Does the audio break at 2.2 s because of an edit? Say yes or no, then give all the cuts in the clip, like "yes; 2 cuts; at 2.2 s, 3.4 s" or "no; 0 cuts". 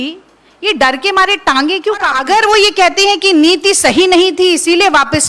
yes; 1 cut; at 2.2 s